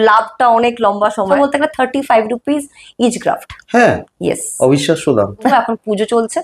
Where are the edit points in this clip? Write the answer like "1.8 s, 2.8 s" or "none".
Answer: 1.3 s, 5.5 s